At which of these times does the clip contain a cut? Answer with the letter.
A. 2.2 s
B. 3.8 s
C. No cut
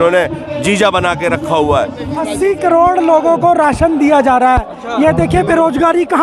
A